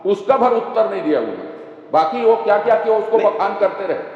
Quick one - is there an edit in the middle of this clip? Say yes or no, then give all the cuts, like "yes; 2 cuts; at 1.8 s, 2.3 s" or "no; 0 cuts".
no; 0 cuts